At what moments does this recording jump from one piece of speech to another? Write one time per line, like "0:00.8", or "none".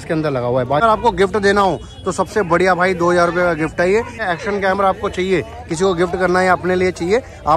0:00.8
0:04.2

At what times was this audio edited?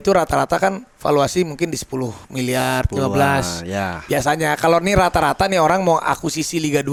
none

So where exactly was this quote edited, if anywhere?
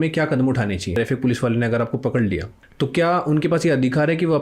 0:00.9
0:02.6

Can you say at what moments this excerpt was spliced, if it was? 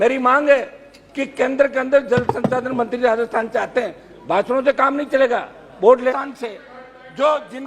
0:06.1

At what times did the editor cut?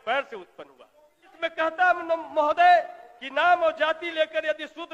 0:01.3

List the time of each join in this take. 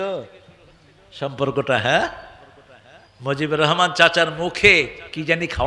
none

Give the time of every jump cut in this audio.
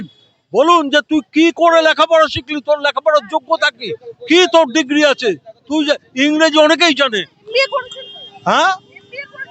none

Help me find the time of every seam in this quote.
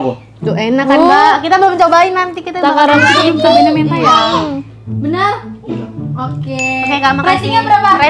none

